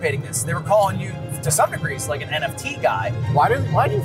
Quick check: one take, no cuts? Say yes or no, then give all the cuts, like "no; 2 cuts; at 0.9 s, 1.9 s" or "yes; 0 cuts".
yes; 0 cuts